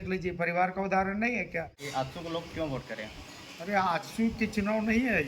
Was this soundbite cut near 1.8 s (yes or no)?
yes